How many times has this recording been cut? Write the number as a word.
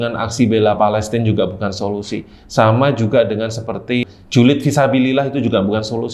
one